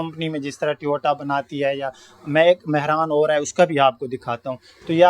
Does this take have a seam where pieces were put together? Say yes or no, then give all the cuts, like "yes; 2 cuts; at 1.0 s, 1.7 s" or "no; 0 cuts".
no; 0 cuts